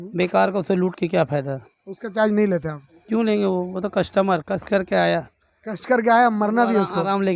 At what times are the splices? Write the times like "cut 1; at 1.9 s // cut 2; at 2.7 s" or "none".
none